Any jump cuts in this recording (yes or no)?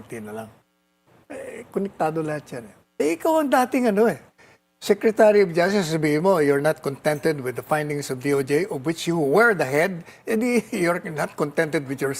yes